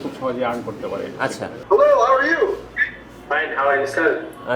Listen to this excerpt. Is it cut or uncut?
cut